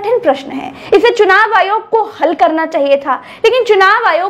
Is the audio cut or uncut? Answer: uncut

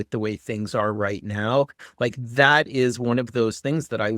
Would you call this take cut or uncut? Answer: uncut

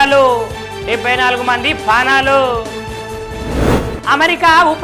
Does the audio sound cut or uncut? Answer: cut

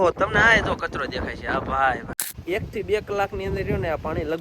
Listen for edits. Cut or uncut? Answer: cut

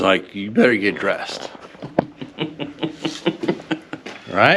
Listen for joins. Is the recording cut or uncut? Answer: uncut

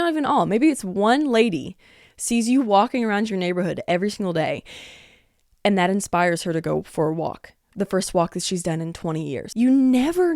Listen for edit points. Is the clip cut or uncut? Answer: cut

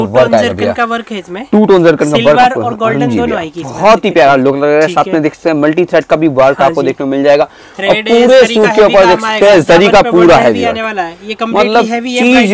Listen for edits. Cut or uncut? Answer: uncut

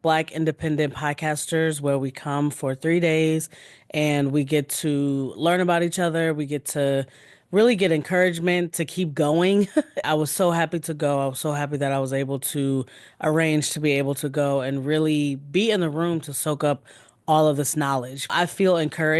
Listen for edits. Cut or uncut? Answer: cut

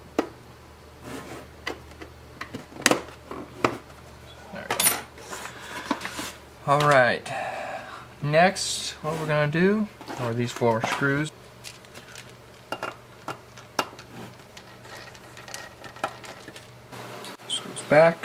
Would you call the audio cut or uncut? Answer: uncut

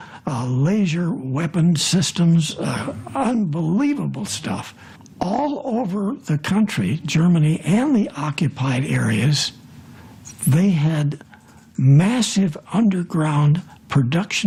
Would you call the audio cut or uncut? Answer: uncut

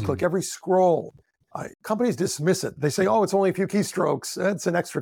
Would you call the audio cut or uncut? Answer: cut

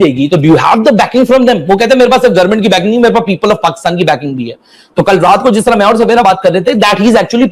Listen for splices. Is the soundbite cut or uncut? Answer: uncut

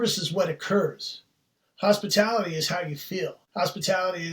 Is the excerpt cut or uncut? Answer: cut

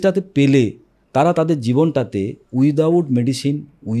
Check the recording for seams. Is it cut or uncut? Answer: uncut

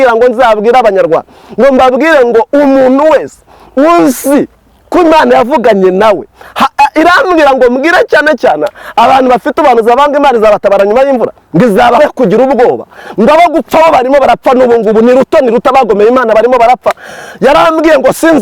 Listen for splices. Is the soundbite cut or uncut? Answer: cut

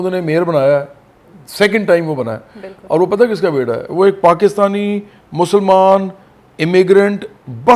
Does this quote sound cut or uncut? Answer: uncut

